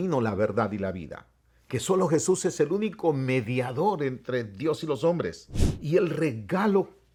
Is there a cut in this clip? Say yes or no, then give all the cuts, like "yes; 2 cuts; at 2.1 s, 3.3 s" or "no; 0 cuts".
no; 0 cuts